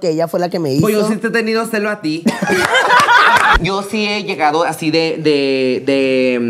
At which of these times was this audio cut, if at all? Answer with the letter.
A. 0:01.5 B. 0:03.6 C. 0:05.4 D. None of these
B